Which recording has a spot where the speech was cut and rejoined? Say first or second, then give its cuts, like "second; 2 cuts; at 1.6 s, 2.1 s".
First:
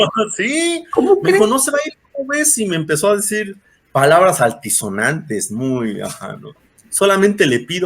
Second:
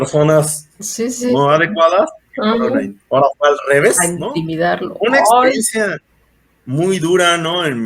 first; 1 cut; at 6.6 s